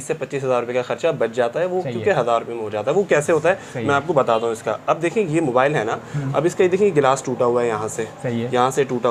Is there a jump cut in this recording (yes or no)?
no